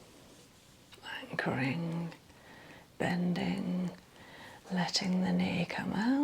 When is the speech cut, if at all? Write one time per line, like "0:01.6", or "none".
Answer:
0:00.9